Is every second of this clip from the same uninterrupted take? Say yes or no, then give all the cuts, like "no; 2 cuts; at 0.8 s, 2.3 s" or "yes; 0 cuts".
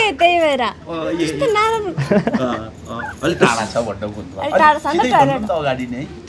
yes; 0 cuts